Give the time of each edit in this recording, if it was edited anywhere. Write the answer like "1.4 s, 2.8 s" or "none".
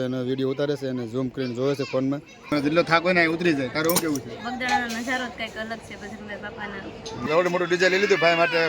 2.5 s, 7.2 s